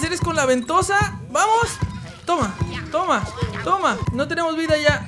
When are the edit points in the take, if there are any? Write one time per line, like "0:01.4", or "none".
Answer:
0:04.0